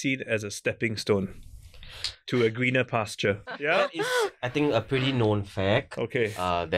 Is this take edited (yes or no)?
no